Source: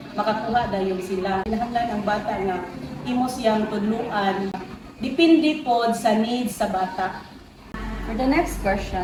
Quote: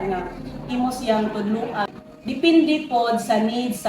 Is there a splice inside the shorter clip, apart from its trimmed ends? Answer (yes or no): yes